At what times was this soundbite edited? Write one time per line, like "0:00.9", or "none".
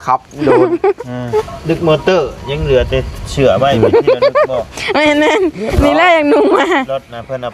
0:01.4